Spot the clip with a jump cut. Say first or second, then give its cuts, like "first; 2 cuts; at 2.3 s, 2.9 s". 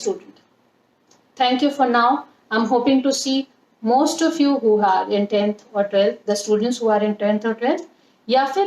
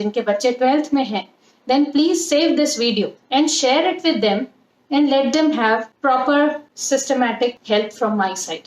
second; 4 cuts; at 3.2 s, 5.9 s, 6.7 s, 7.6 s